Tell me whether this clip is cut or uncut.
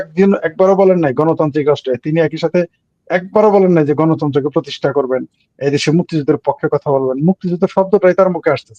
uncut